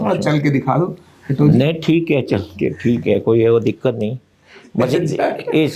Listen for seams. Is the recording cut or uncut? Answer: uncut